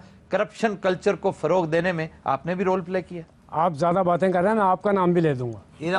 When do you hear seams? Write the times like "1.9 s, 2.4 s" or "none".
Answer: none